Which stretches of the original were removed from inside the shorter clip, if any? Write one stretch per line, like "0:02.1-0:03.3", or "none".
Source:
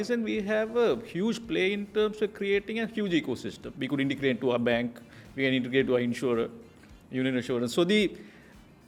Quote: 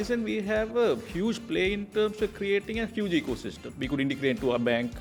none

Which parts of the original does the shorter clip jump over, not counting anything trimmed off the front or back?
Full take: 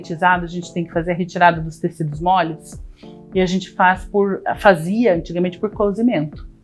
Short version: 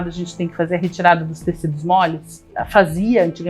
0:02.9-0:04.5

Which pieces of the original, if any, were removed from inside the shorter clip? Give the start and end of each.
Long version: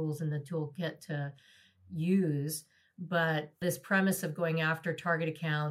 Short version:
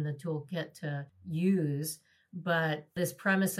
0:01.4-0:01.8

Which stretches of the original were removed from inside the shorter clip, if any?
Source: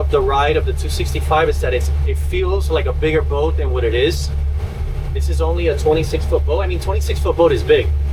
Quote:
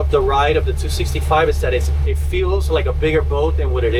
none

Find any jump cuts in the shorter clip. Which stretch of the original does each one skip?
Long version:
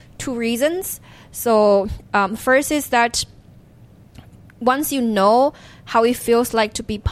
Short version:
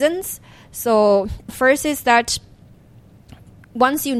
0:02.1-0:02.3

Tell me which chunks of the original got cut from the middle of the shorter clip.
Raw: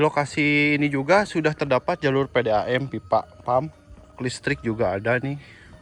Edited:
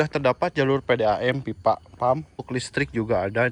0:03.8-0:04.1

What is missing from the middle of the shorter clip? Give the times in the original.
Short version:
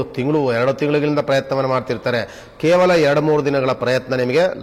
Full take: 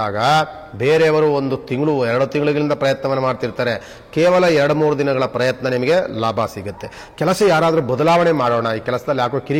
none

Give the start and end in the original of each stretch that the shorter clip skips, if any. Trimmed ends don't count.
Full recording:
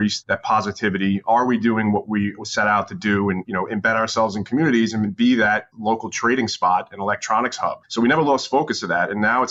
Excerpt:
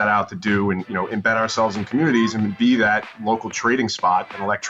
none

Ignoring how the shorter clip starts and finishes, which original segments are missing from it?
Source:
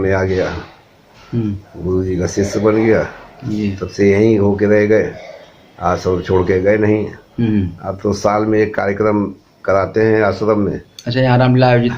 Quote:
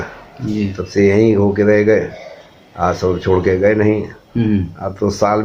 none

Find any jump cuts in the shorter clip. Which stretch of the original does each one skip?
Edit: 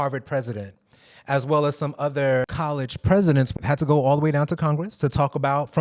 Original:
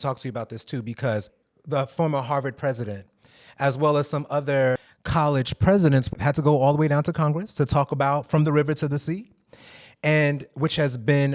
0:04.9-0:05.2

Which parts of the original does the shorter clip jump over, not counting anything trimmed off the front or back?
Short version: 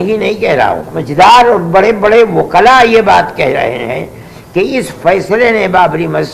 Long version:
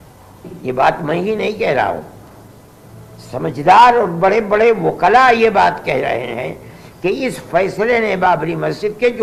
0:02.1-0:03.4

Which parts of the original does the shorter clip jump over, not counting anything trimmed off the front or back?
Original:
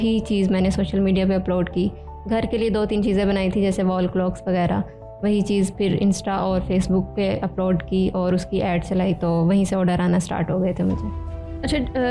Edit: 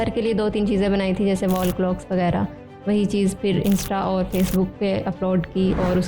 none

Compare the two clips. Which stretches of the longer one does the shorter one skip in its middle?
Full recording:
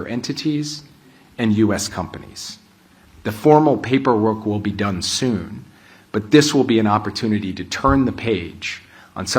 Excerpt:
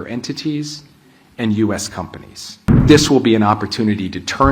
0:02.8-0:06.3

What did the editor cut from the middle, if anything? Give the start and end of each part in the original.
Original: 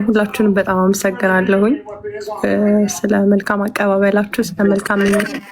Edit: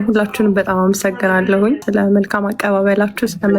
0:01.8-0:03.0

